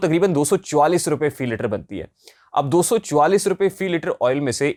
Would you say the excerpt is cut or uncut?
uncut